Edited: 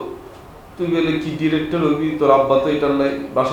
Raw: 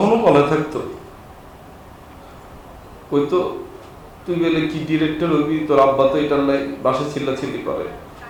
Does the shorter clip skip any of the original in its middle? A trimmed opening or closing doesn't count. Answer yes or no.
no